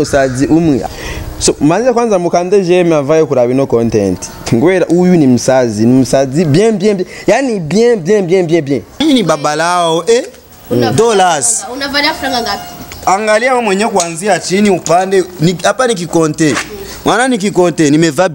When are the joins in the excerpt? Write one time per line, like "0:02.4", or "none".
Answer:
0:00.8
0:09.0